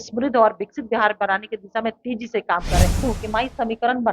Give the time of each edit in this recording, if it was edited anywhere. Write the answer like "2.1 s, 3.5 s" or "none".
3.0 s